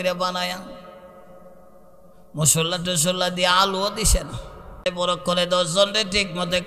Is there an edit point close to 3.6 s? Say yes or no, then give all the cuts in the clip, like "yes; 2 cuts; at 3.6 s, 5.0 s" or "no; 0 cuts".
no; 1 cut; at 4.9 s